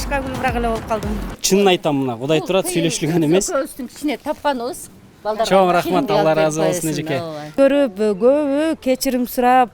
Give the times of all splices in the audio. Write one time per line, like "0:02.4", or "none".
0:01.3
0:07.5